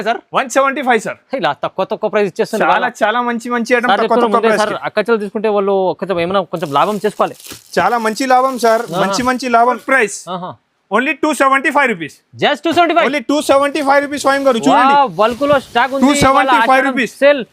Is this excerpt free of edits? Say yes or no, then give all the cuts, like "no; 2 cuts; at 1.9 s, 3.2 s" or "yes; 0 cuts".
no; 1 cut; at 9.8 s